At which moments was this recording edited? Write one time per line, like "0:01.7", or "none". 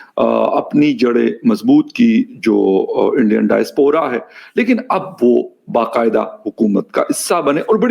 none